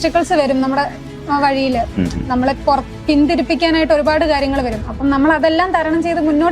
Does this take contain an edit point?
no; 0 cuts

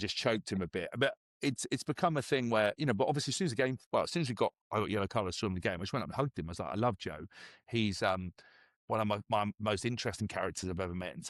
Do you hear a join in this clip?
no; 0 cuts

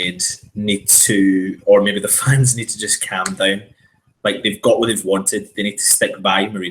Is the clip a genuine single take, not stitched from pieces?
yes; 0 cuts

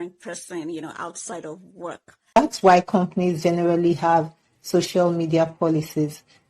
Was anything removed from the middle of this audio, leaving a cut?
yes; 1 cut; at 2.4 s

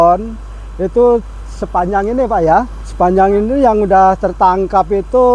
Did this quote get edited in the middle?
yes; 1 cut; at 2.8 s

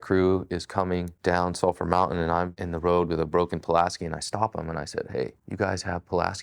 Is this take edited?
yes; 3 cuts; at 1.1 s, 2.6 s, 5.4 s

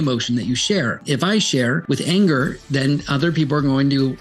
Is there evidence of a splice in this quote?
yes; 2 cuts; at 1.0 s, 1.8 s

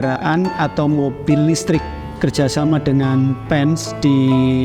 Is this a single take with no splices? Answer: no; 1 cut; at 2.1 s

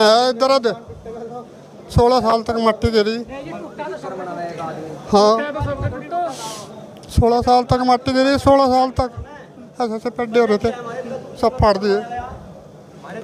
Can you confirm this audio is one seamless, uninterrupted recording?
yes; 0 cuts

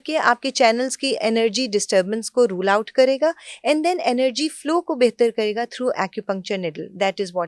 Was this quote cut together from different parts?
no; 0 cuts

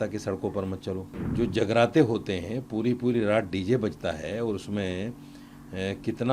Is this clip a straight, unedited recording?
no; 1 cut; at 1.2 s

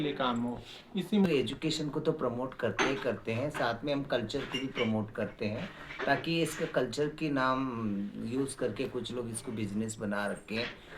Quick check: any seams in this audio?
yes; 1 cut; at 1.3 s

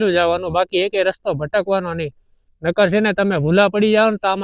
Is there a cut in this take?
no; 0 cuts

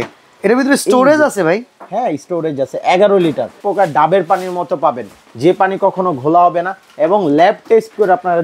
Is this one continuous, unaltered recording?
no; 1 cut; at 3.6 s

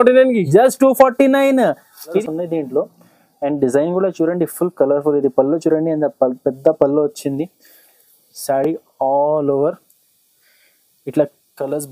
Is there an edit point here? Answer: yes; 1 cut; at 2.2 s

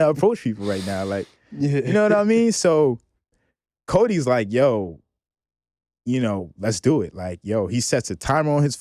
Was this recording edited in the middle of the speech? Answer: no; 0 cuts

